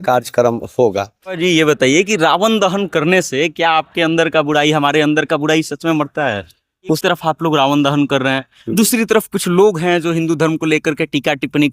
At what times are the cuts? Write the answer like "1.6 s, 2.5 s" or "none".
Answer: 1.4 s, 7.0 s